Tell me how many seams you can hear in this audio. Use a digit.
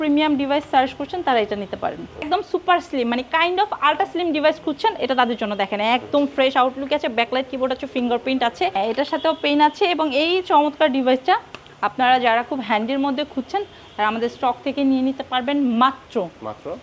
2